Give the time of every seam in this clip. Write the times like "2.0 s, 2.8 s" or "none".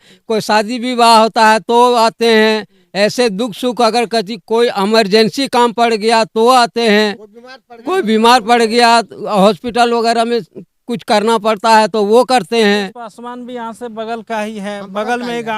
13.2 s